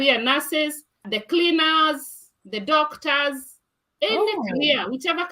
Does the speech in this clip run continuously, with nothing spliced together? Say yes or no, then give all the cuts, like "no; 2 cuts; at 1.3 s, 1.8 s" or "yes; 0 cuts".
no; 1 cut; at 1.1 s